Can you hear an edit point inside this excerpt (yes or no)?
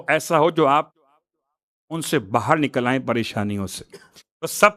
no